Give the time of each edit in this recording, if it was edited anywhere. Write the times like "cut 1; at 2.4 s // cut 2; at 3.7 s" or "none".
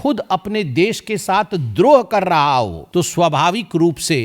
cut 1; at 2.8 s